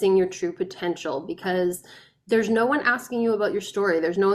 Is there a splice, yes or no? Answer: no